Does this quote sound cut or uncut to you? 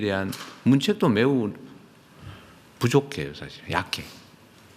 uncut